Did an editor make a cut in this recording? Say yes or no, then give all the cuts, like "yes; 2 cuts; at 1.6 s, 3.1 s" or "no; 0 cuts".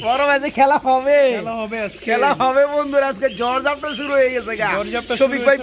no; 0 cuts